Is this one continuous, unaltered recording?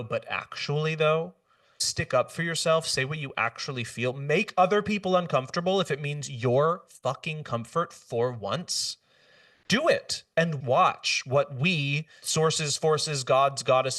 yes; 0 cuts

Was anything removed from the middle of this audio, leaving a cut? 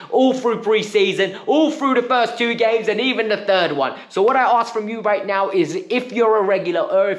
no; 0 cuts

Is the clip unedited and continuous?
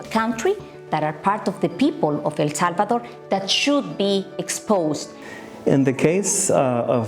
no; 1 cut; at 5.2 s

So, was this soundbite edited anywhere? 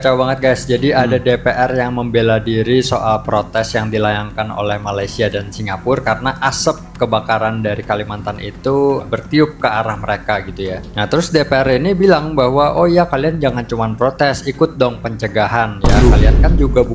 no; 0 cuts

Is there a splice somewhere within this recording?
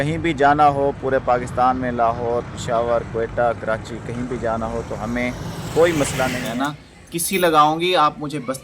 yes; 1 cut; at 6.4 s

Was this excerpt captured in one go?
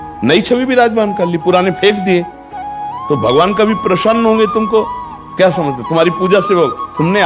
yes; 0 cuts

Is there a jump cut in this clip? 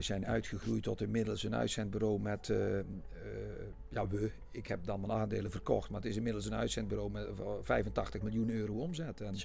no; 0 cuts

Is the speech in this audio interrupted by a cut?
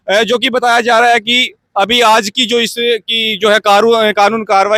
no; 0 cuts

